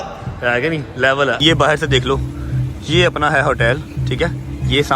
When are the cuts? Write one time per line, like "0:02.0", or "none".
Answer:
0:01.4